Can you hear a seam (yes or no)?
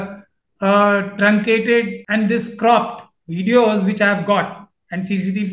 yes